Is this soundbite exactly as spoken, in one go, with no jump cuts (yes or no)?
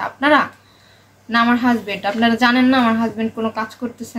yes